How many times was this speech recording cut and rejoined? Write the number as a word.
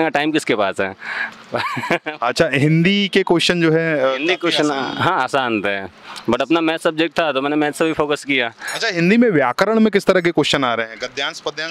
zero